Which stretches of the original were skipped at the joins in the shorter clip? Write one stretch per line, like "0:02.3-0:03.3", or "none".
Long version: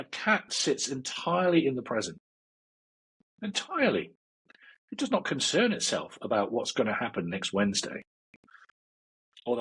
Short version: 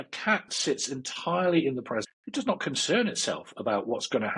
0:02.2-0:04.8